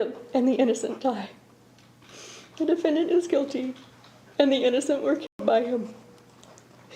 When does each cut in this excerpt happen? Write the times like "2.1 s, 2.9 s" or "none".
none